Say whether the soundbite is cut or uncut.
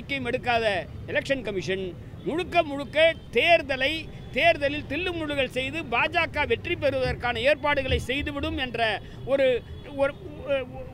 uncut